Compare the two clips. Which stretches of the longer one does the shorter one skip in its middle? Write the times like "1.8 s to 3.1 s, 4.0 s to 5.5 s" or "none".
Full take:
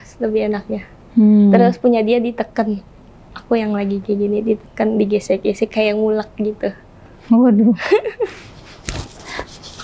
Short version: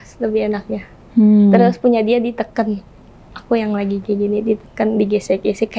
none